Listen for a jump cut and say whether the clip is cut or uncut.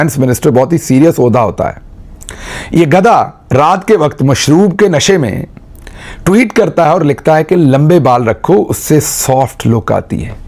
uncut